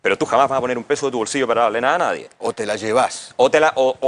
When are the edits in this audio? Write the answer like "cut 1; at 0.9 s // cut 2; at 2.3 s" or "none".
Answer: none